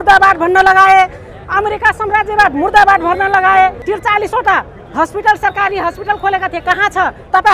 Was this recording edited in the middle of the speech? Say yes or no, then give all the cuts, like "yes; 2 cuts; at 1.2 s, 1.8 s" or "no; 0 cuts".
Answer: yes; 1 cut; at 3.8 s